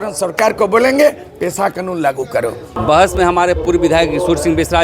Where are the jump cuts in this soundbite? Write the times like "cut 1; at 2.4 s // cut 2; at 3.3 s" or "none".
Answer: cut 1; at 2.8 s